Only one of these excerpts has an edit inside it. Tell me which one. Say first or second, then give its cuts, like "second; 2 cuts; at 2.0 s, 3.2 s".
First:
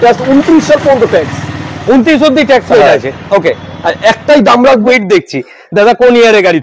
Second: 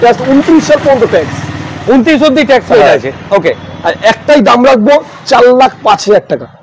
first; 1 cut; at 4.8 s